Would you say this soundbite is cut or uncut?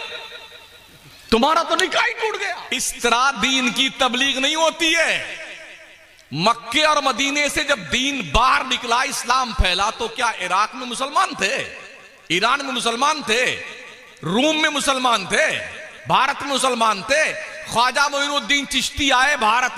cut